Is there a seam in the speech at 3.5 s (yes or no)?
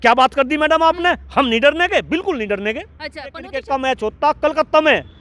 yes